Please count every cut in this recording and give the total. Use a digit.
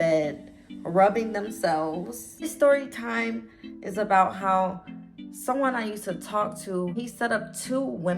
2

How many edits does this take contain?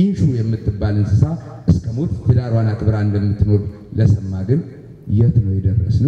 0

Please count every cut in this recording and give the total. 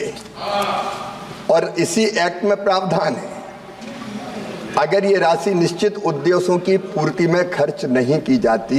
1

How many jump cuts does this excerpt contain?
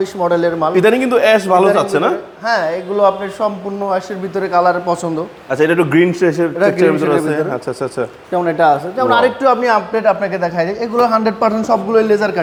0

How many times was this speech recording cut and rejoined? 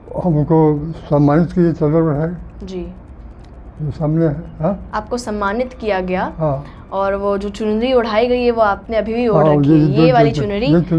0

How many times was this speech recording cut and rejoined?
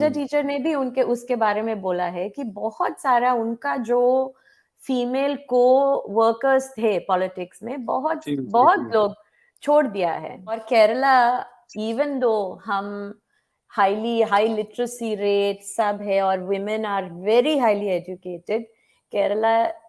1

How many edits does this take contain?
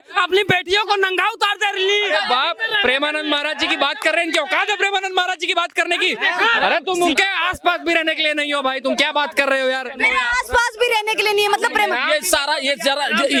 0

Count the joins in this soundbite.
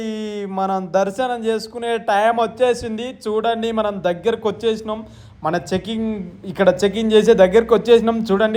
0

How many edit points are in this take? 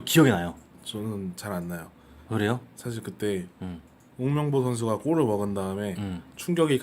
1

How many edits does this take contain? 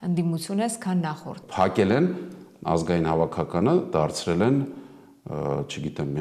1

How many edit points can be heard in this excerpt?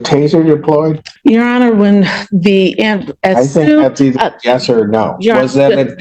1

